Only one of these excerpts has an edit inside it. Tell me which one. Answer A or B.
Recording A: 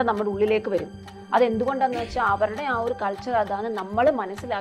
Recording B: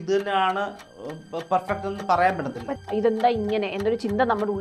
B